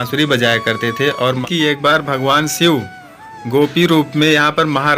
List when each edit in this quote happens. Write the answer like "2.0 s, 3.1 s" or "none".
1.4 s